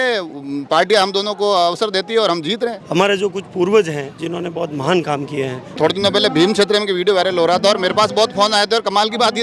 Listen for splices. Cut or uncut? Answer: cut